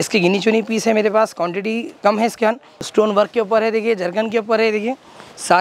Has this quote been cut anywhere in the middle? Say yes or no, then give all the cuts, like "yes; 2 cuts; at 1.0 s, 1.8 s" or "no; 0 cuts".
yes; 1 cut; at 2.7 s